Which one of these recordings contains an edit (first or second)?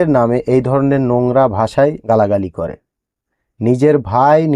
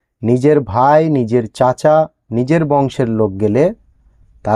first